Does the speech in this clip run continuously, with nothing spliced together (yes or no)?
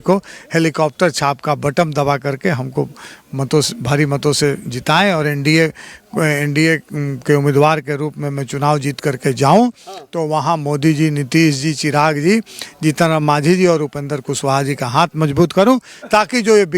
yes